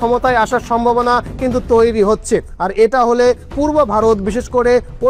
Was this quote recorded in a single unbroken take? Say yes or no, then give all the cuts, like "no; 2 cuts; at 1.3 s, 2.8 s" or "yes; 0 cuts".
yes; 0 cuts